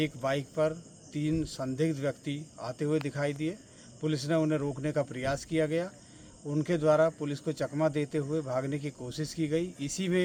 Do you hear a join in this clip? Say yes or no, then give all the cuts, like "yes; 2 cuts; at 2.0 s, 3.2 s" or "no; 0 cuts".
no; 0 cuts